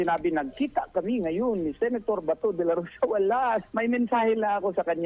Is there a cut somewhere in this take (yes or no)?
yes